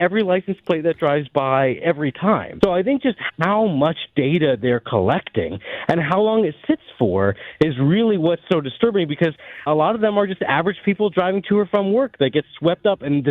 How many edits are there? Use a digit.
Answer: 2